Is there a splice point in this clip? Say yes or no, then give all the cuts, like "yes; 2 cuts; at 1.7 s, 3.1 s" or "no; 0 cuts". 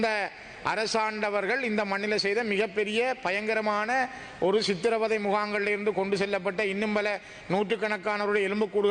no; 0 cuts